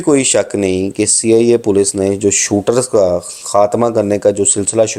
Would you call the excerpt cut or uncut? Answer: uncut